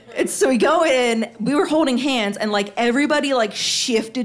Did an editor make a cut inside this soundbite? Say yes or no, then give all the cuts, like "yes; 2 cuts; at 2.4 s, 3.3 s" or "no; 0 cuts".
yes; 1 cut; at 1.3 s